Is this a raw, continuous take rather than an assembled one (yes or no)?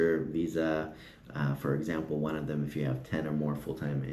yes